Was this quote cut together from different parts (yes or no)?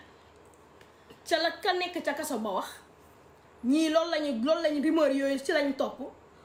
no